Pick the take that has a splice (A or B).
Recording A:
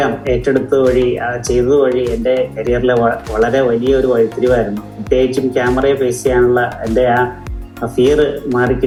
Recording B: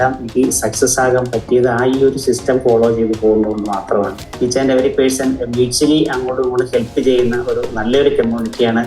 B